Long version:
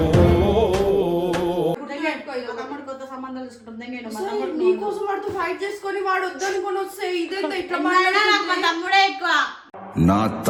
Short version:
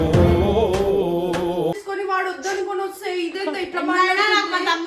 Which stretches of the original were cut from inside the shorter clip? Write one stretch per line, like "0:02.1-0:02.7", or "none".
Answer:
0:01.8-0:05.8